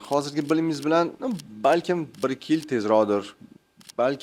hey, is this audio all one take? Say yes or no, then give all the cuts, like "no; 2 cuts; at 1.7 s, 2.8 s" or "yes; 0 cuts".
yes; 0 cuts